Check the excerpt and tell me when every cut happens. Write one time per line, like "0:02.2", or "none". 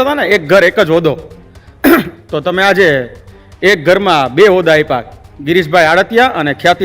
none